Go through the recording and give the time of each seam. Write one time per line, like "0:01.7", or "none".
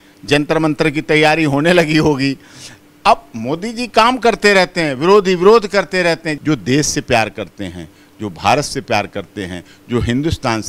0:06.3